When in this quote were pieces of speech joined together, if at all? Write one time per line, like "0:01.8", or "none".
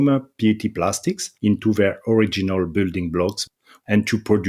0:01.3
0:03.5